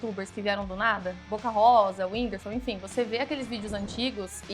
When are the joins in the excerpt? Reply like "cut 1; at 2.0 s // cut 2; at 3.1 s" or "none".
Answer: cut 1; at 1.2 s

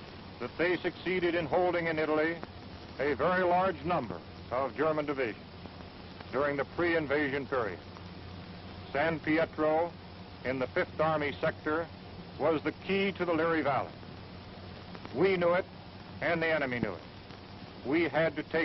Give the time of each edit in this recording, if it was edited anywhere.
cut 1; at 7.3 s

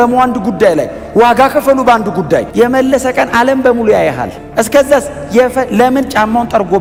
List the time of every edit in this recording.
none

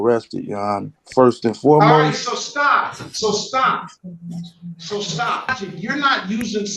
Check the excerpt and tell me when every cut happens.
cut 1; at 5.5 s

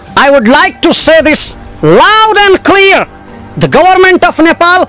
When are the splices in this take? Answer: none

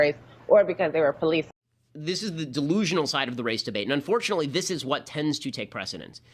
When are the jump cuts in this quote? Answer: none

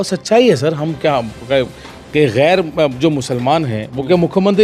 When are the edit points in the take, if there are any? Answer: none

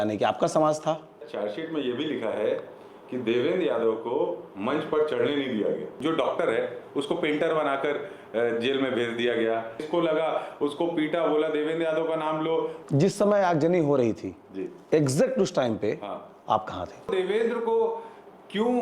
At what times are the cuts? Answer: cut 1; at 1.3 s // cut 2; at 6.0 s // cut 3; at 9.8 s // cut 4; at 12.8 s // cut 5; at 17.1 s

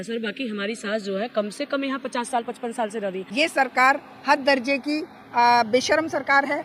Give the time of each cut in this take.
cut 1; at 3.2 s

